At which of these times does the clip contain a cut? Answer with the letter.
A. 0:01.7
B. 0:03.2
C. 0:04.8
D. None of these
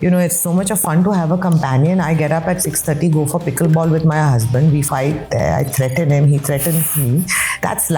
C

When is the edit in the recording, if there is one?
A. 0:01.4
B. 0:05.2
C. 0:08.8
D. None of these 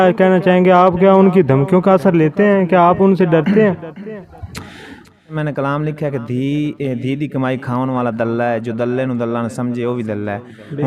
B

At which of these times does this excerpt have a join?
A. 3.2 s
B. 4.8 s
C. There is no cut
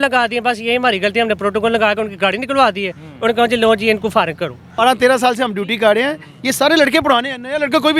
B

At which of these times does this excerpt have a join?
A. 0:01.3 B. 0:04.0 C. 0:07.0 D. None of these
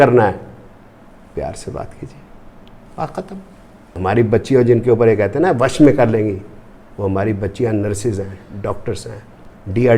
B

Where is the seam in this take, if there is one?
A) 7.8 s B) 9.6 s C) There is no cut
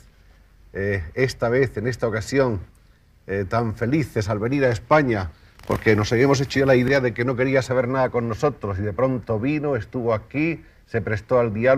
B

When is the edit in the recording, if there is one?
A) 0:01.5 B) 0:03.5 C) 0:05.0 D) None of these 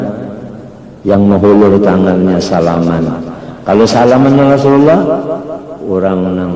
D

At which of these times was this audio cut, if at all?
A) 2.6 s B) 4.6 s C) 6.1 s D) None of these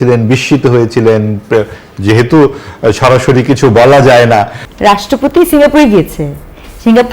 B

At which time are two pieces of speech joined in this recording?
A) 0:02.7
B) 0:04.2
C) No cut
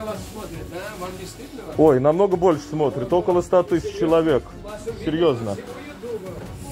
C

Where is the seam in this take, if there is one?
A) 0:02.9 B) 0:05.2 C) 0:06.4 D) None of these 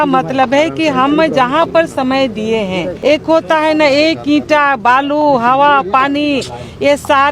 A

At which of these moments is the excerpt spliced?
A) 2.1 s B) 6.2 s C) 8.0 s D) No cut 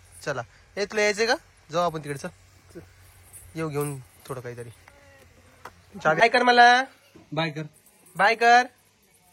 B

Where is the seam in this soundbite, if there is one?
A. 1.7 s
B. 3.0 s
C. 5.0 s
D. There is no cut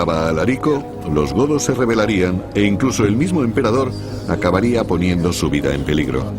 B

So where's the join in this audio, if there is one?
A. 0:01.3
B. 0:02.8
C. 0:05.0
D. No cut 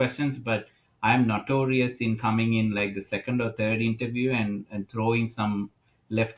D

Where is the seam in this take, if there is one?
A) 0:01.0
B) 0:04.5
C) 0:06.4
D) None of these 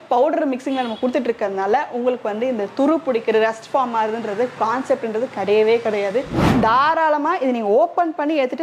C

